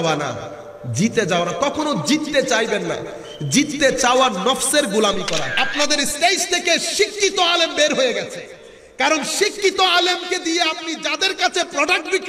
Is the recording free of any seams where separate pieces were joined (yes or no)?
no